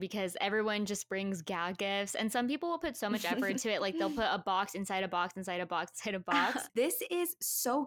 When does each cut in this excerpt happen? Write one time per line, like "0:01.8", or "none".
0:06.7

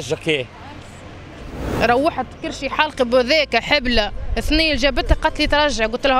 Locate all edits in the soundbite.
0:01.7

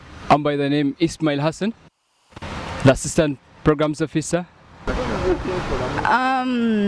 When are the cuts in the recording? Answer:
0:04.9

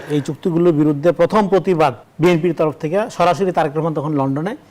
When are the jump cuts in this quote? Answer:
0:02.1

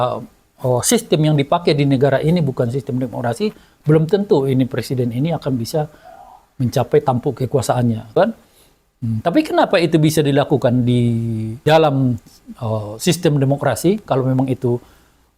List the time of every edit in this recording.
0:08.2
0:11.5

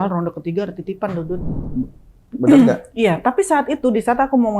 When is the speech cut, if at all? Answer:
0:01.6

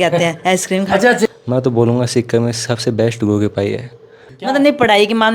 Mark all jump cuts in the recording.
0:01.3
0:04.2

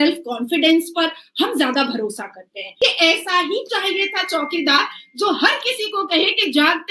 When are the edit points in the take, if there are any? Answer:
0:02.6

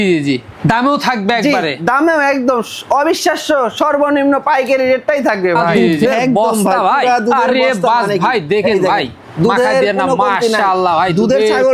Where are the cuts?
0:05.9

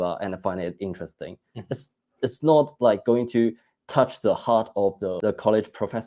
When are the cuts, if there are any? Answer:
0:05.2

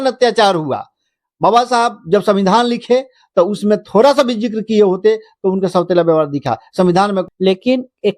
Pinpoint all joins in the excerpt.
0:07.2

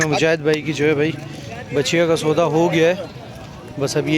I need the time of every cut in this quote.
none

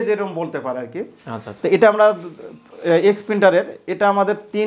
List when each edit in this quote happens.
none

